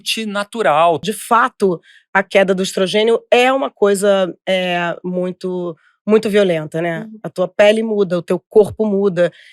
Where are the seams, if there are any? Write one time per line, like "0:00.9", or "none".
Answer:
0:01.0

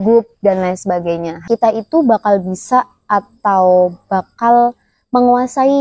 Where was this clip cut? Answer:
0:01.3

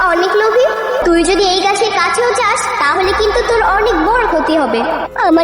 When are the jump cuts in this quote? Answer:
0:01.0

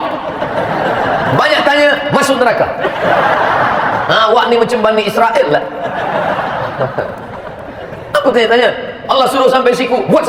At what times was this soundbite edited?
none

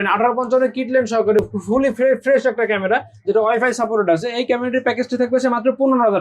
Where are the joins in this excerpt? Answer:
none

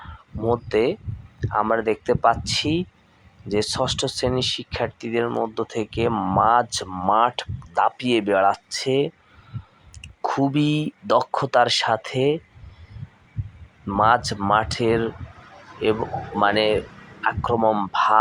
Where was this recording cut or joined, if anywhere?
none

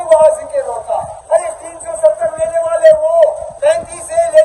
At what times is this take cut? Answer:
0:01.1
0:03.5

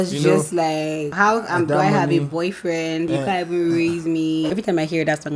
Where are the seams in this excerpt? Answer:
0:01.1
0:03.1
0:04.5

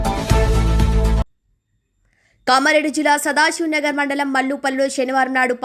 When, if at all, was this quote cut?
0:01.2

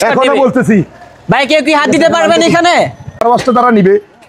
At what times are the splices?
0:03.2

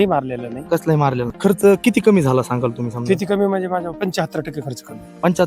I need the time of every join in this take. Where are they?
0:01.4

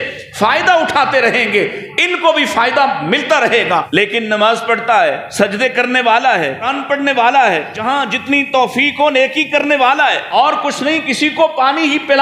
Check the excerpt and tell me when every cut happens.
0:03.9
0:05.2
0:06.8
0:07.7
0:10.3

